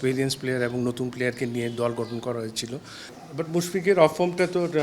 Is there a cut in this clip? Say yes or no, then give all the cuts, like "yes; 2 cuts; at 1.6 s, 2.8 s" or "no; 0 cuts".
yes; 1 cut; at 2.9 s